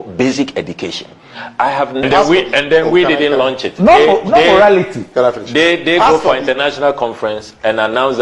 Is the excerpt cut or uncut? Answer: cut